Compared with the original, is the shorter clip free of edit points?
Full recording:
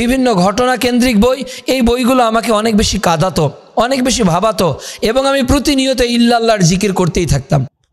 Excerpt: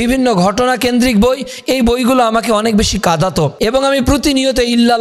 no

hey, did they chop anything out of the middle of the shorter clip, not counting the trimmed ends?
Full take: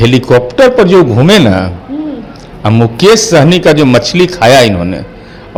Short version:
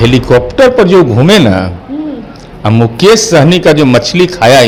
no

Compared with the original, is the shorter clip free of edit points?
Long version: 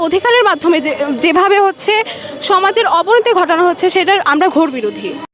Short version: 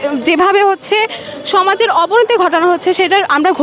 yes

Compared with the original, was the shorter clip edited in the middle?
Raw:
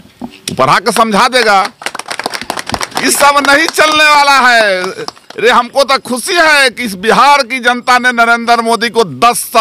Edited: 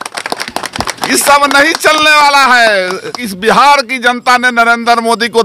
yes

